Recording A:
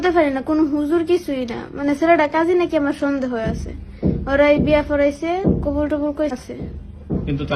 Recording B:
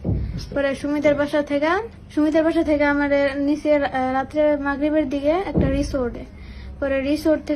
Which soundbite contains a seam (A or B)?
B